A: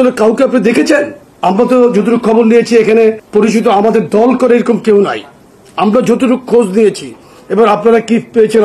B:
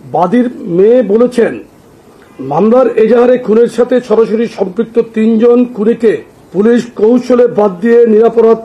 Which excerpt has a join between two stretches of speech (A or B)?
A